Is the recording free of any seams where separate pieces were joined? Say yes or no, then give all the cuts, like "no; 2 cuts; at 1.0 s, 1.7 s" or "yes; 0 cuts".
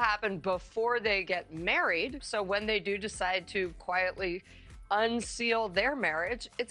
yes; 0 cuts